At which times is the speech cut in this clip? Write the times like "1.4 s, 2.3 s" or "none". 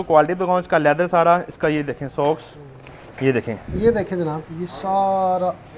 none